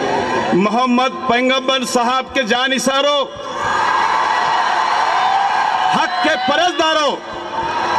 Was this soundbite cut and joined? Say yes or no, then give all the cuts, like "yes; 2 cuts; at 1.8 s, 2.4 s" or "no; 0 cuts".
no; 0 cuts